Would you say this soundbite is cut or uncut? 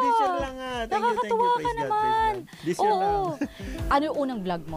cut